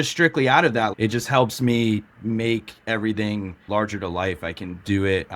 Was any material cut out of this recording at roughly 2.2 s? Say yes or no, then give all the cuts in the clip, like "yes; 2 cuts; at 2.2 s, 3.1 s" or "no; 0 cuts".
no; 2 cuts; at 0.9 s, 3.7 s